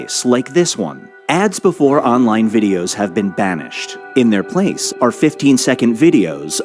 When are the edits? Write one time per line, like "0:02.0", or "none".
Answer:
0:03.1